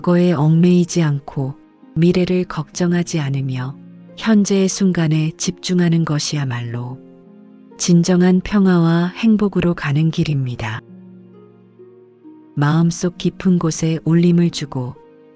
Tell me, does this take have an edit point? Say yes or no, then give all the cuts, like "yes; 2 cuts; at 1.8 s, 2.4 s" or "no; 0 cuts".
no; 0 cuts